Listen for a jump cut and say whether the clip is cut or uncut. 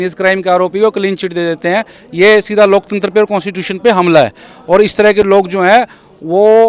uncut